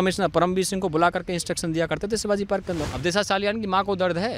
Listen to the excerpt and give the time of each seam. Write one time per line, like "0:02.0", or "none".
0:02.8